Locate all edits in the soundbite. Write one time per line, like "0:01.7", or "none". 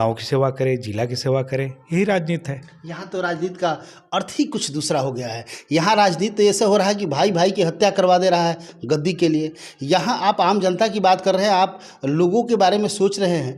none